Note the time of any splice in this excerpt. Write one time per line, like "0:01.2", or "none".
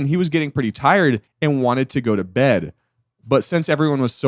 0:01.3